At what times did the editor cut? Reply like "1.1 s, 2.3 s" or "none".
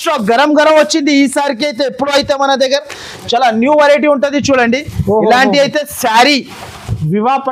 none